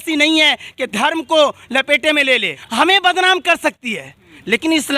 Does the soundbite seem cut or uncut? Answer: cut